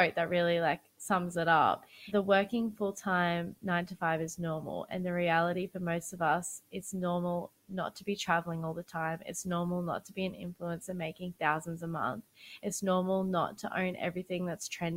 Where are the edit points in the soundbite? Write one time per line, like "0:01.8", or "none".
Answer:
0:00.9
0:02.0